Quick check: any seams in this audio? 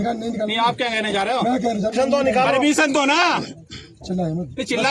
yes; 1 cut; at 1.9 s

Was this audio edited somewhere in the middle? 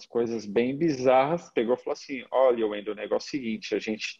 yes; 1 cut; at 1.5 s

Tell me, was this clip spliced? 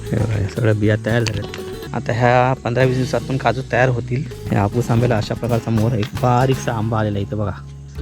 yes; 2 cuts; at 1.8 s, 4.3 s

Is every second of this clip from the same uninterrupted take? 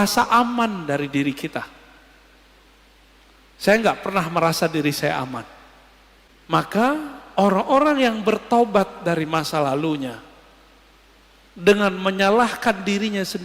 no; 1 cut; at 6.4 s

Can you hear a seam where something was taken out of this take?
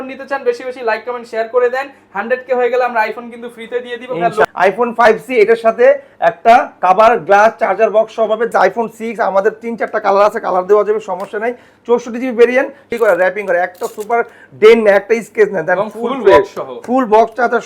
yes; 3 cuts; at 4.4 s, 8.5 s, 12.9 s

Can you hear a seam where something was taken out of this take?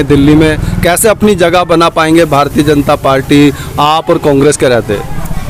no; 0 cuts

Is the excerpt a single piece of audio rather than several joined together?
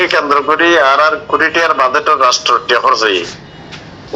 yes; 0 cuts

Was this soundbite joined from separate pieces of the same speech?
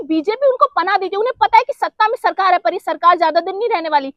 no; 0 cuts

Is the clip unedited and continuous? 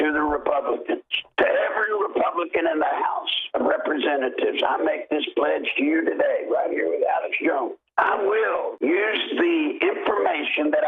no; 3 cuts; at 1.2 s, 7.8 s, 8.7 s

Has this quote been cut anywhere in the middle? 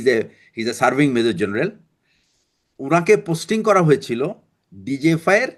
no; 0 cuts

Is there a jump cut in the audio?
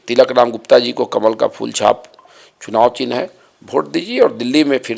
no; 0 cuts

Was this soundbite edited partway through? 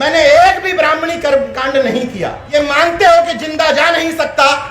yes; 1 cut; at 2.3 s

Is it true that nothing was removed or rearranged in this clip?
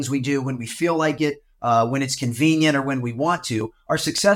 yes; 0 cuts

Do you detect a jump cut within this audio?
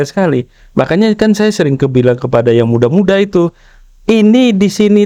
no; 0 cuts

